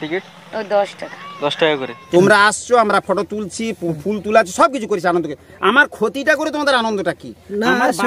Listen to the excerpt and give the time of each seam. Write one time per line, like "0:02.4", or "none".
0:02.0